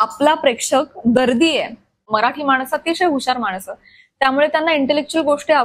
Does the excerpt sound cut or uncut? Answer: cut